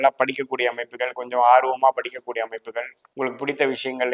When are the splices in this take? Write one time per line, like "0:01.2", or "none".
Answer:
0:03.0